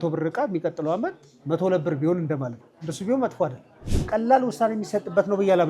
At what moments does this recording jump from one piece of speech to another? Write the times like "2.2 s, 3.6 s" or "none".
3.9 s